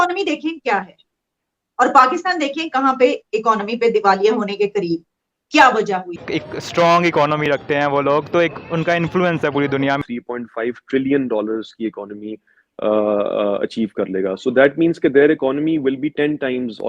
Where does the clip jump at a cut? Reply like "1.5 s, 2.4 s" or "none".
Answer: 6.3 s, 10.0 s

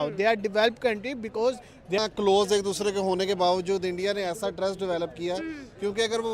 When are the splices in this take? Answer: 2.0 s

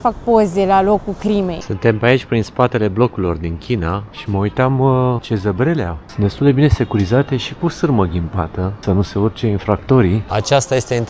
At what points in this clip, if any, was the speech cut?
1.6 s, 4.1 s, 5.2 s, 6.0 s, 8.8 s, 10.2 s

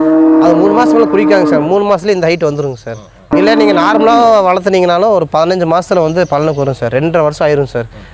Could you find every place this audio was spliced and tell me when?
3.3 s

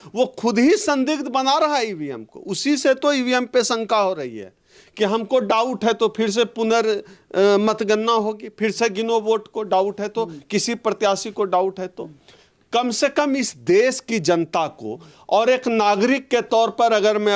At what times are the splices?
none

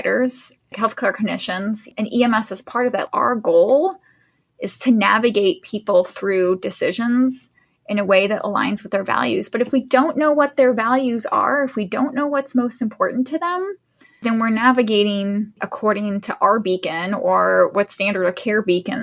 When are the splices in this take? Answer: none

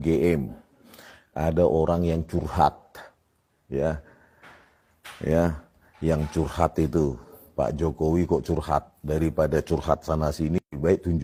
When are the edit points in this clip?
none

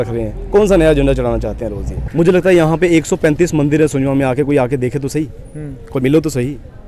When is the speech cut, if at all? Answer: 2.0 s

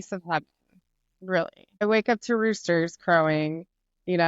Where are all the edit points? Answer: 1.8 s

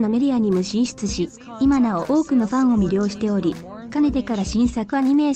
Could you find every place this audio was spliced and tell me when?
none

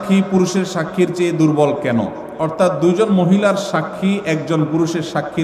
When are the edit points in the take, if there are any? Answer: none

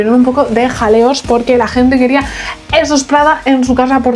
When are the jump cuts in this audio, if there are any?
none

